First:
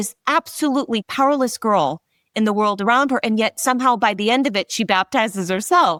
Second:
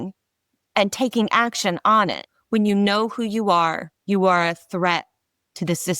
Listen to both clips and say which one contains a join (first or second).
second